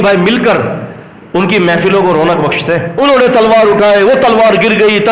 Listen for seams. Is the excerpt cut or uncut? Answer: cut